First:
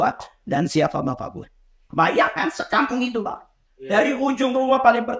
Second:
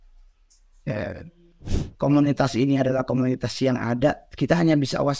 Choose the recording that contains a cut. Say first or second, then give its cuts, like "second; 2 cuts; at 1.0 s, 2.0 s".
second; 1 cut; at 1.8 s